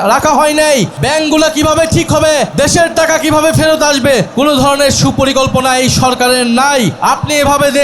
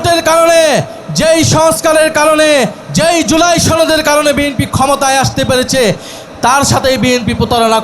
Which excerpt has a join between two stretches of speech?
first; 4 cuts; at 1.0 s, 2.5 s, 4.3 s, 7.0 s

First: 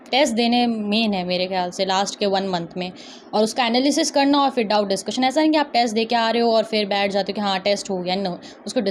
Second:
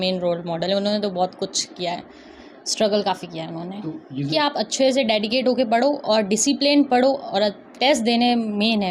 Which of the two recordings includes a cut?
second; 1 cut; at 4.3 s

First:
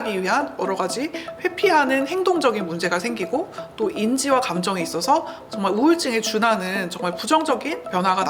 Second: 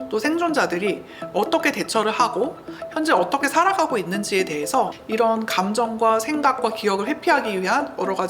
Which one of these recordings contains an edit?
second; 1 cut; at 5.0 s

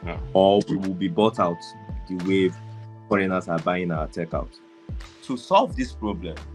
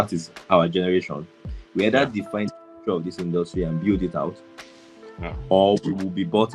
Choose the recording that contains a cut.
first; 1 cut; at 5.1 s

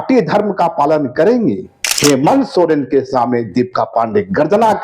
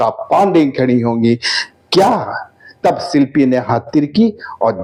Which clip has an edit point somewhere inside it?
first; 1 cut; at 1.9 s

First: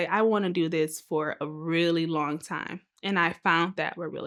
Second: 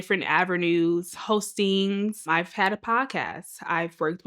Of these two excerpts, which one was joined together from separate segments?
second; 2 cuts; at 1.2 s, 2.3 s

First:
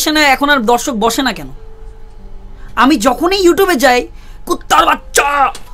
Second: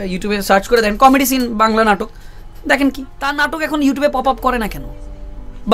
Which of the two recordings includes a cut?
second; 1 cut; at 3.5 s

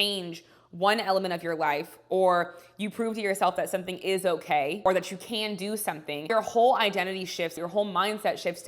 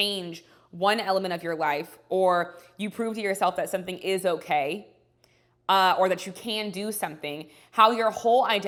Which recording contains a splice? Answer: first; 3 cuts; at 4.8 s, 6.3 s, 7.6 s

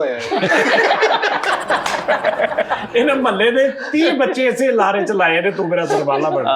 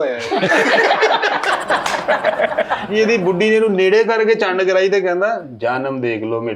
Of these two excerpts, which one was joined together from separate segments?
second; 1 cut; at 2.9 s

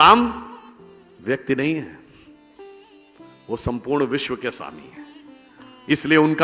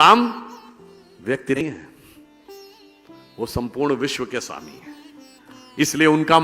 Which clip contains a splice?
second; 1 cut; at 1.6 s

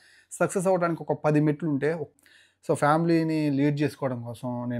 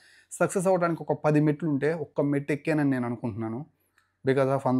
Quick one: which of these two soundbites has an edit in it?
first; 1 cut; at 2.1 s

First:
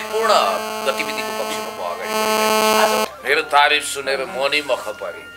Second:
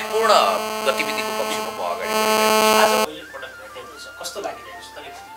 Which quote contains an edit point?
first; 1 cut; at 3.2 s

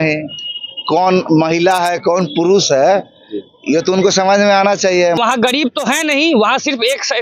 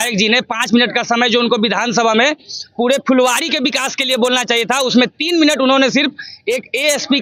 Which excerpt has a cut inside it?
first; 1 cut; at 5.2 s

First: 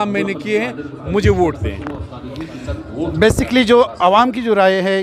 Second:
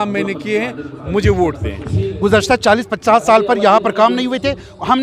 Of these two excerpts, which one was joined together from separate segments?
second; 1 cut; at 1.9 s

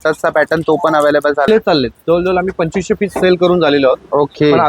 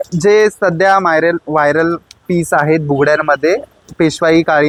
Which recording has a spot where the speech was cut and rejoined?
first; 1 cut; at 1.5 s

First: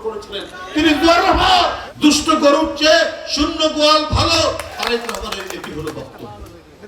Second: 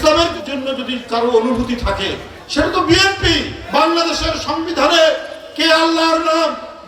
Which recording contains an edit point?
first; 2 cuts; at 1.9 s, 4.7 s

